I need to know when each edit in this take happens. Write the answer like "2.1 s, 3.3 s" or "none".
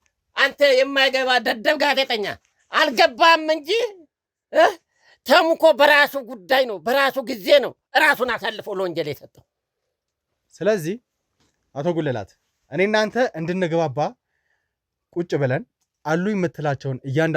none